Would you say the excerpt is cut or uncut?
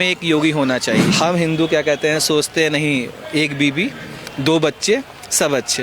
cut